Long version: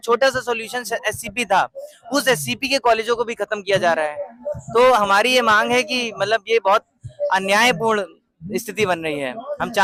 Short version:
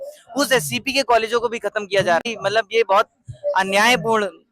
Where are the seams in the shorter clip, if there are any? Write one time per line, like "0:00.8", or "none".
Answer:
0:02.2